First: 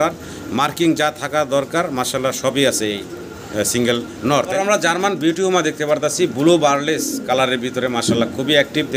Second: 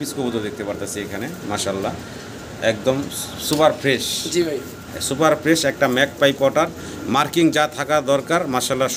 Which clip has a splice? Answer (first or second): first